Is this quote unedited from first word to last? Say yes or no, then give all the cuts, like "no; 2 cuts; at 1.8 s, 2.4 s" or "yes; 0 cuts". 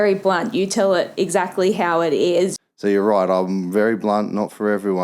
no; 1 cut; at 2.6 s